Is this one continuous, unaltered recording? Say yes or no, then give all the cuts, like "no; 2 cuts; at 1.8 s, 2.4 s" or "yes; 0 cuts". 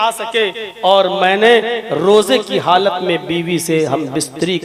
yes; 0 cuts